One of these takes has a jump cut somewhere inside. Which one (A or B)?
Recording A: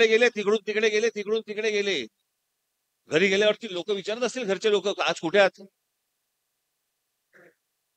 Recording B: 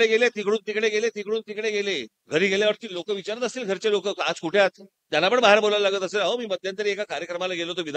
B